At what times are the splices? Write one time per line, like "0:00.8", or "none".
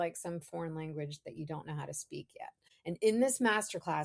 0:02.7